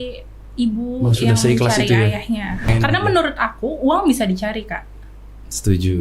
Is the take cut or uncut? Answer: cut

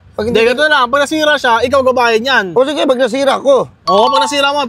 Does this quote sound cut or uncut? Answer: uncut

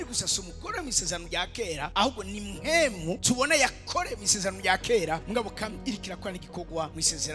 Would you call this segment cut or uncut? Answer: uncut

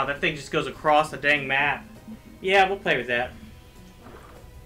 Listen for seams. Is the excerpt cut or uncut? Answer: uncut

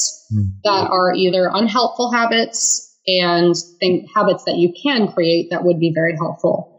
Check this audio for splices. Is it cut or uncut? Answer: uncut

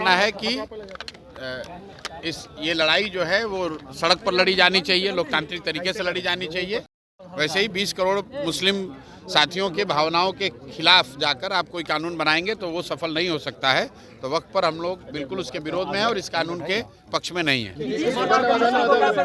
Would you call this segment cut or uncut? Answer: uncut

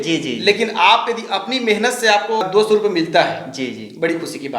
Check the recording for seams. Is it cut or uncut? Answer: cut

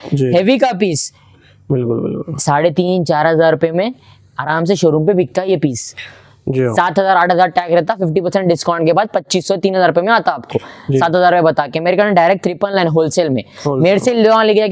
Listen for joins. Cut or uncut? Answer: uncut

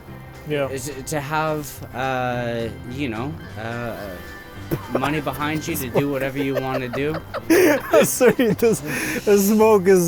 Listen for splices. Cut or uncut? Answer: uncut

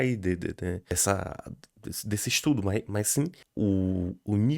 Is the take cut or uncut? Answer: cut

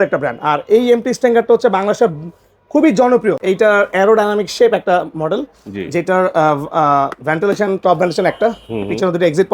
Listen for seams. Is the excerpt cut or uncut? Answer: cut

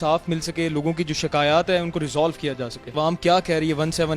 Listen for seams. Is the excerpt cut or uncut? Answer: cut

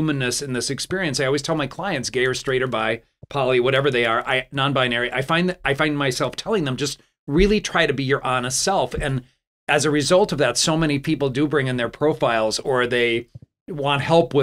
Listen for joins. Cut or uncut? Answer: uncut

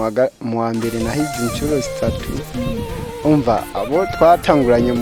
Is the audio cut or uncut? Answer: uncut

